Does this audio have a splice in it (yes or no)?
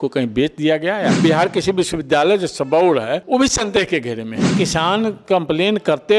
yes